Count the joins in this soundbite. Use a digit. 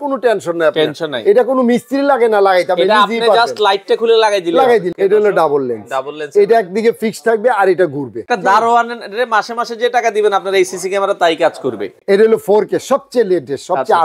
3